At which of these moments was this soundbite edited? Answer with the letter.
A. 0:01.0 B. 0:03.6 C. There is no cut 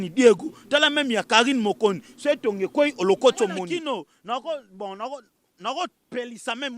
B